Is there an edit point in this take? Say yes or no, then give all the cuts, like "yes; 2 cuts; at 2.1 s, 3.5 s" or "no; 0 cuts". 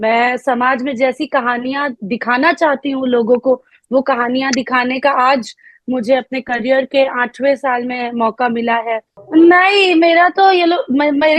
yes; 1 cut; at 9.1 s